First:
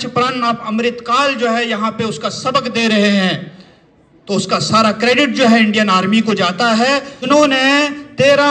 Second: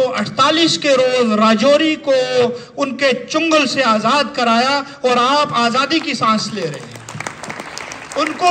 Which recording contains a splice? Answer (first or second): first